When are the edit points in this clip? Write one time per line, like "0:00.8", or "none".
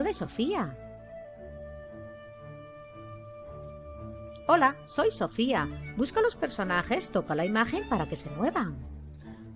0:00.7
0:02.3
0:04.4